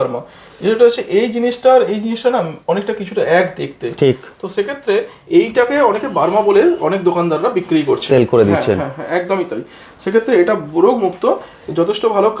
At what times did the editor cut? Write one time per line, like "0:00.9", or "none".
none